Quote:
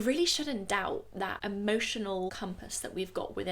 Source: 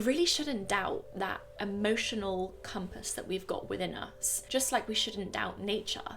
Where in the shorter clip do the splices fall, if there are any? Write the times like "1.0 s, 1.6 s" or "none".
1.4 s, 2.4 s